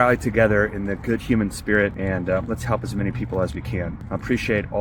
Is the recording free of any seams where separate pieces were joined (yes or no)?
no